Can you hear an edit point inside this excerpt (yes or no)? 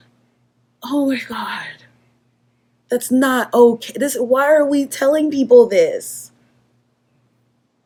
no